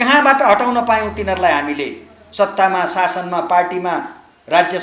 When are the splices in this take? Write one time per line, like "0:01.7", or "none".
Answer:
none